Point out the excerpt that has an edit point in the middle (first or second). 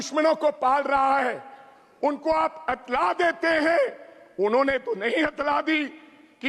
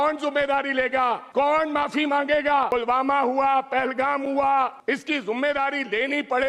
second